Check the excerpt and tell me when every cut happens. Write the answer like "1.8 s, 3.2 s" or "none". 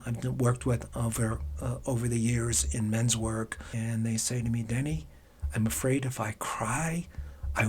3.7 s